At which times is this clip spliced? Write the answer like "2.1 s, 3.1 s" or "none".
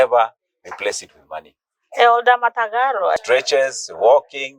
3.2 s